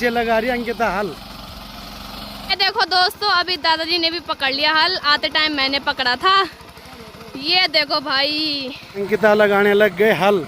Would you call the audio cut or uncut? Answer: uncut